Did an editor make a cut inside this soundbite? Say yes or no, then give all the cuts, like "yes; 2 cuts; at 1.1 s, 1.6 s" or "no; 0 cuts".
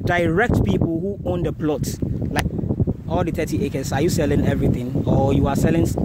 yes; 1 cut; at 2.4 s